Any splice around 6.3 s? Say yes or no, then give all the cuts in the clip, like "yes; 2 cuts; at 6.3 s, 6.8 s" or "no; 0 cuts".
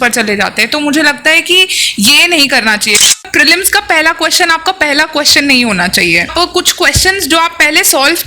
yes; 2 cuts; at 3.1 s, 6.3 s